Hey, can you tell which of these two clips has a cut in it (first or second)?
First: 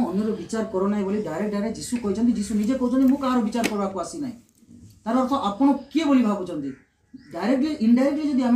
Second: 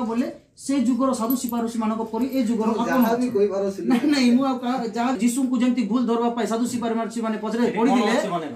second